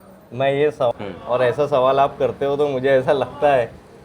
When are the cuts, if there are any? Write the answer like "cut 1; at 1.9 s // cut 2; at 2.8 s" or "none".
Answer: cut 1; at 0.9 s